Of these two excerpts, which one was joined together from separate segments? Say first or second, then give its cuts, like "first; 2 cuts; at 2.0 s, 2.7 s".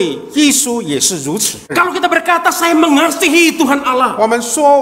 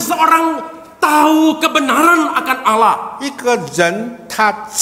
first; 1 cut; at 1.7 s